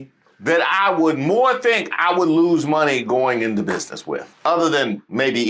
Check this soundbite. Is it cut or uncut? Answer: cut